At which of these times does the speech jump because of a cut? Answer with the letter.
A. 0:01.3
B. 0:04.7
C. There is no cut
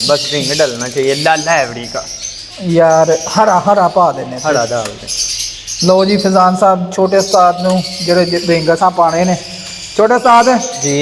C